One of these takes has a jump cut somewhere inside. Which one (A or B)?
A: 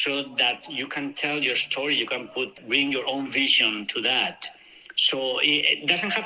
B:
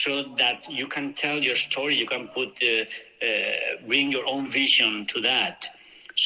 A